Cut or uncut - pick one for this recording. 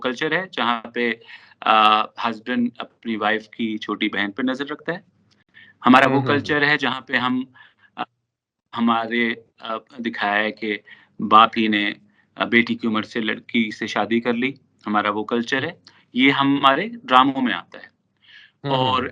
uncut